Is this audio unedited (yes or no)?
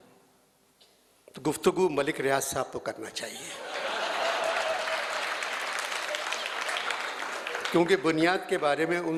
yes